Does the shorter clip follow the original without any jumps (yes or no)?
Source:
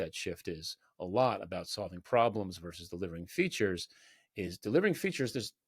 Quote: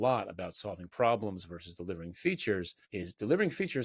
no